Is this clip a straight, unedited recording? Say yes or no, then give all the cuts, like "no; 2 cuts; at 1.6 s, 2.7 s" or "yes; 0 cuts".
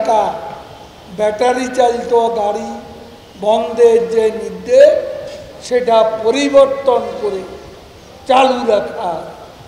yes; 0 cuts